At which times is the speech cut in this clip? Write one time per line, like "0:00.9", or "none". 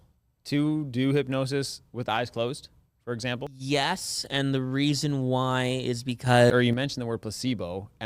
0:03.6
0:06.5